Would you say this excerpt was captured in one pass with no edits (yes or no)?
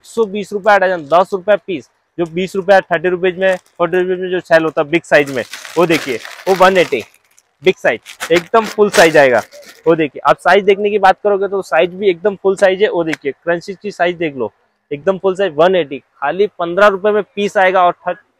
yes